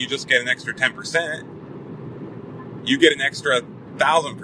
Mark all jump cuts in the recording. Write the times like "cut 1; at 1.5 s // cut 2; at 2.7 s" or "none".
none

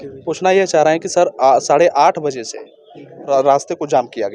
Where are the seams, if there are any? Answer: cut 1; at 3.3 s

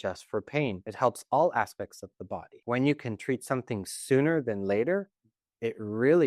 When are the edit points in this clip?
cut 1; at 0.8 s // cut 2; at 2.5 s

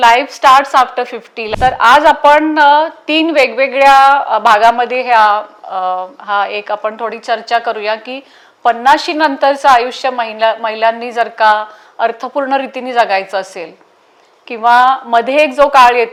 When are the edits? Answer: none

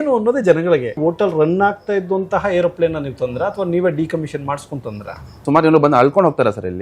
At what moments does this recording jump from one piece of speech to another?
cut 1; at 1.0 s // cut 2; at 5.4 s

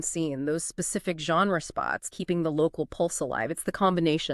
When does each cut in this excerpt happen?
cut 1; at 2.1 s

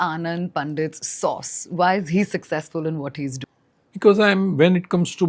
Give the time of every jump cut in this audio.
cut 1; at 3.5 s

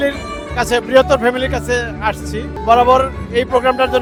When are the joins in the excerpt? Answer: none

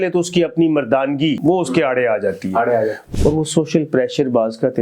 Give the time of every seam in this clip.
cut 1; at 1.4 s // cut 2; at 3.0 s

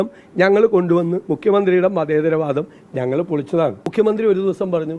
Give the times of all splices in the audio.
cut 1; at 3.9 s

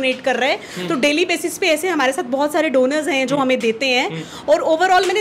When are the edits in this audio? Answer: none

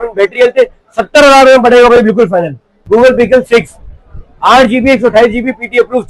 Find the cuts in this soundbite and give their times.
cut 1; at 2.7 s

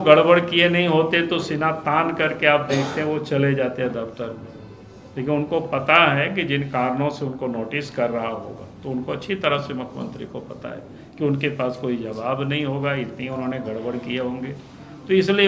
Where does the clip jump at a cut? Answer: none

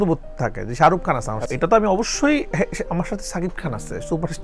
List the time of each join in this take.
cut 1; at 1.4 s

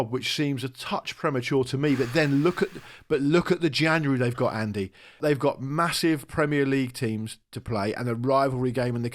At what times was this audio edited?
cut 1; at 5.2 s

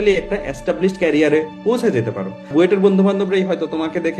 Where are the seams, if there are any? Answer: cut 1; at 2.5 s

